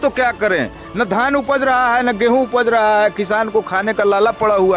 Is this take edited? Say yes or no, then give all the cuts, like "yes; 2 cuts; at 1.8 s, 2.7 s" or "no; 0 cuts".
no; 0 cuts